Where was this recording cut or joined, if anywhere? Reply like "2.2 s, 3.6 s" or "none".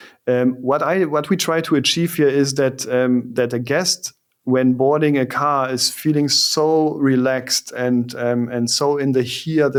none